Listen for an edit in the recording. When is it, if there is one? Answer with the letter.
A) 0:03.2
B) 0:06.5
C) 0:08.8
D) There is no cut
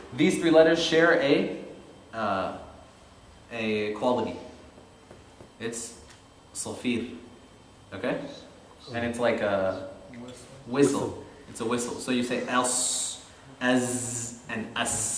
D